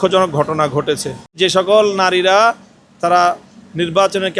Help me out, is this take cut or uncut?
cut